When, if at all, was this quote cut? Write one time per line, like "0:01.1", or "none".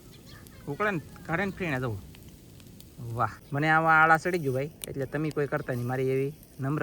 0:03.4

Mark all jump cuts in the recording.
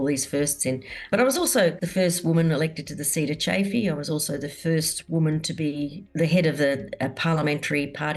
0:01.1
0:01.8
0:06.0

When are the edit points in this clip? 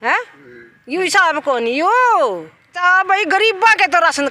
0:02.8

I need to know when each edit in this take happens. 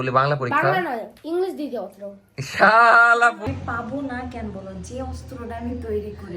0:03.5

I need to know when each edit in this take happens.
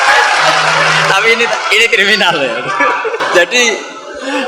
0:03.2

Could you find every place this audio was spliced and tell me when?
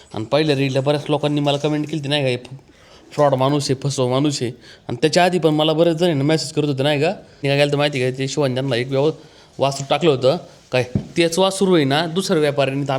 0:07.4

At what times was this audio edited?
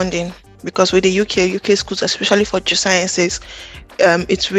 none

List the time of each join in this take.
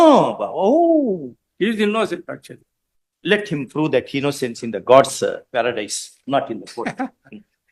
none

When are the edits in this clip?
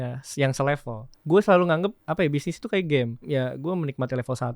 0:01.2
0:02.0
0:03.2

